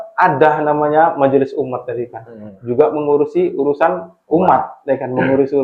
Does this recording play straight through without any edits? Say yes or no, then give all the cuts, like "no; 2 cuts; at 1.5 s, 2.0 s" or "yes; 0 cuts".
yes; 0 cuts